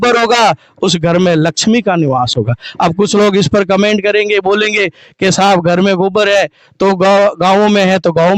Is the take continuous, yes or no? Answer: yes